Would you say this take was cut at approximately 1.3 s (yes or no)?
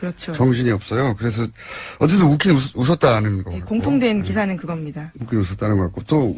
no